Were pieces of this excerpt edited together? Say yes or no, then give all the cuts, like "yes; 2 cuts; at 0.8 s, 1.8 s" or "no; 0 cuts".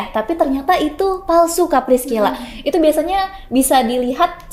no; 0 cuts